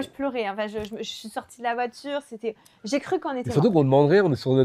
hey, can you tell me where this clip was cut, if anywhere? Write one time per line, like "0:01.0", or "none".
none